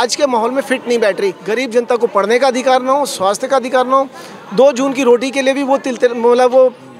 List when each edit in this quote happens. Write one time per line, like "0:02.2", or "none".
0:01.4